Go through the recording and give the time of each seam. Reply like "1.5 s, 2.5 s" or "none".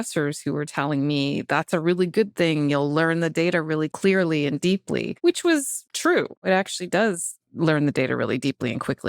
3.9 s, 5.1 s, 6.3 s